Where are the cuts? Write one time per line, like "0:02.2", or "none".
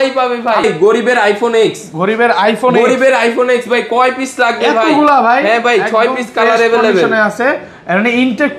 0:00.9